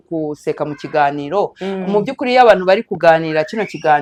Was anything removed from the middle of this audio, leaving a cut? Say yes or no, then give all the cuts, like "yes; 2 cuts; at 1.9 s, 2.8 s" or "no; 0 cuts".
no; 0 cuts